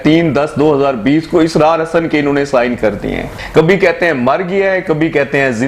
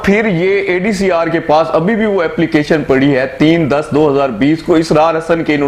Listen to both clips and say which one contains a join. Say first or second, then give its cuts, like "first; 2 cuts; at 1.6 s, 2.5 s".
first; 1 cut; at 3.4 s